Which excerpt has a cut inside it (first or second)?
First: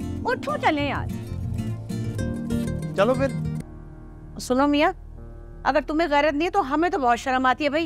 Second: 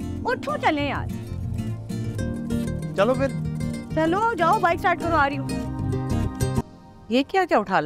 first